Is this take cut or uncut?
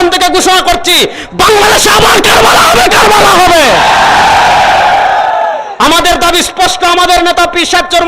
uncut